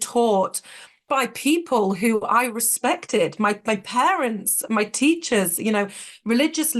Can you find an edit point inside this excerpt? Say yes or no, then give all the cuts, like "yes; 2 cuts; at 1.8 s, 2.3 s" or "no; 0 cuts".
yes; 1 cut; at 1.0 s